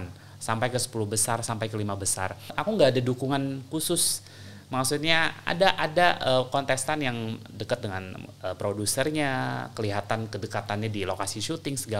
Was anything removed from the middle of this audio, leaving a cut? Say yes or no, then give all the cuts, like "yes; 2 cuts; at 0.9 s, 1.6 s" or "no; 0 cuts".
yes; 1 cut; at 2.6 s